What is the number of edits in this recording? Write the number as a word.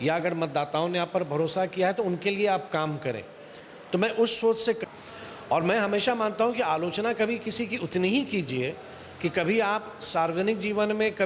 one